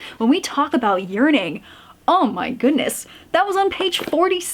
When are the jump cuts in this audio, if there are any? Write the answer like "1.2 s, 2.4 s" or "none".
none